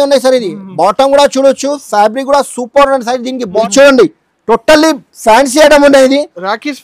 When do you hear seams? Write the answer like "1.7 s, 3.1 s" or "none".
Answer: 3.6 s